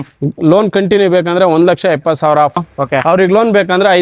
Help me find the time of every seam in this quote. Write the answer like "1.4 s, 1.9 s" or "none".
2.6 s